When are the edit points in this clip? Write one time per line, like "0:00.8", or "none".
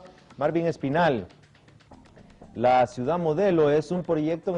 none